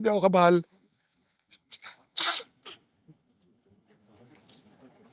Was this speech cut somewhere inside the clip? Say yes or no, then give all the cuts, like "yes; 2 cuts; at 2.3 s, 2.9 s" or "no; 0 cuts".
no; 0 cuts